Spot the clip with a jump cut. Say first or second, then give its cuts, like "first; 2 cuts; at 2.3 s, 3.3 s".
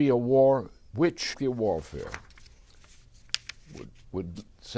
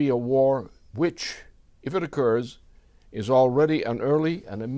second; 1 cut; at 1.3 s